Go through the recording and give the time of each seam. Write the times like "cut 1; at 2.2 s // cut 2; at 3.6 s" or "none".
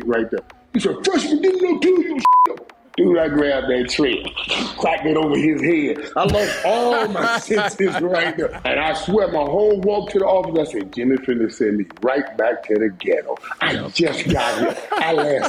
cut 1; at 2.2 s // cut 2; at 8.6 s